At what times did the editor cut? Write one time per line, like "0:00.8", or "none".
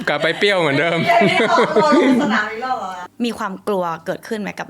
0:03.0